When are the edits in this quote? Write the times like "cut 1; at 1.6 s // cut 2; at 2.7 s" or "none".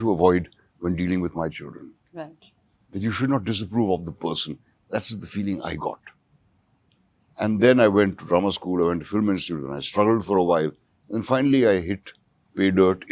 none